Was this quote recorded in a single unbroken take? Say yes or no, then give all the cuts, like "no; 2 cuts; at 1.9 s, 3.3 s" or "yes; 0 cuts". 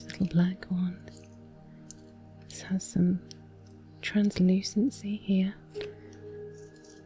no; 1 cut; at 5.6 s